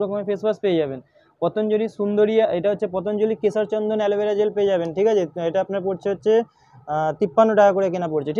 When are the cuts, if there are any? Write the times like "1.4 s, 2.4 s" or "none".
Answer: none